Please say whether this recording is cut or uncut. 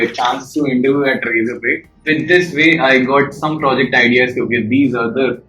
cut